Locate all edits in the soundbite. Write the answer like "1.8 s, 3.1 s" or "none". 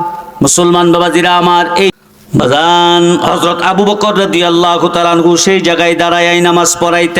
1.9 s